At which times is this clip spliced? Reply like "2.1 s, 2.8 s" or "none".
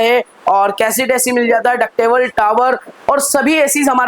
none

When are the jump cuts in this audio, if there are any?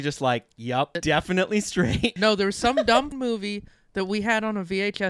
1.0 s, 2.1 s, 3.1 s

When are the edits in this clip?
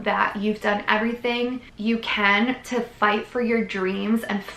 1.7 s

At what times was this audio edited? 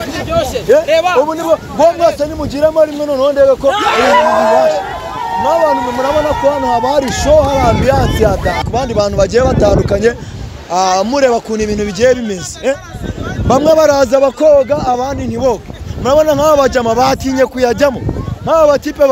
8.6 s

